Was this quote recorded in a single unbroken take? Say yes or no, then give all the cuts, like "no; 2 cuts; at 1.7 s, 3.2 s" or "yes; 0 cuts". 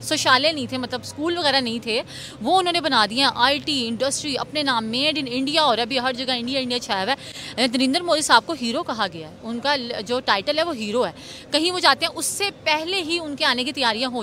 yes; 0 cuts